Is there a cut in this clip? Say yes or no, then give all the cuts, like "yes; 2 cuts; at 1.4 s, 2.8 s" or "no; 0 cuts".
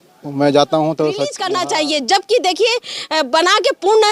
yes; 1 cut; at 1.4 s